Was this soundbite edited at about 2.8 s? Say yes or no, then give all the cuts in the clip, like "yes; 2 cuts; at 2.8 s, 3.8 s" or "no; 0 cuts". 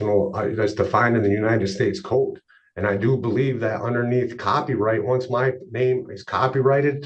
no; 0 cuts